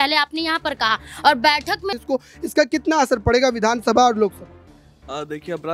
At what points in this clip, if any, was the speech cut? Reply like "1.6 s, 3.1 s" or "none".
2.0 s